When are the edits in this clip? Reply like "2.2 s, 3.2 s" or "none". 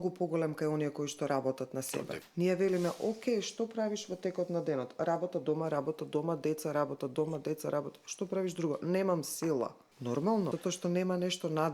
2.2 s, 9.9 s, 10.5 s